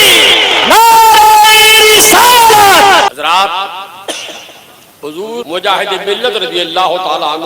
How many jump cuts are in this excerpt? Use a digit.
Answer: 2